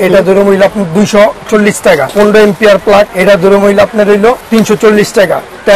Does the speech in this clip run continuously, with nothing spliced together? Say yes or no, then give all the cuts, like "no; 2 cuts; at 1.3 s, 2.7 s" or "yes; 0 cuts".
no; 3 cuts; at 2.1 s, 3.1 s, 4.4 s